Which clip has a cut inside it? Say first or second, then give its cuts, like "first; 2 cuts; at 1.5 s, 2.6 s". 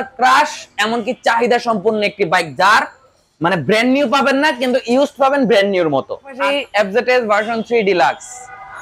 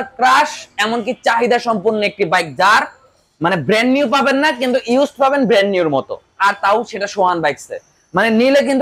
first; 1 cut; at 6.4 s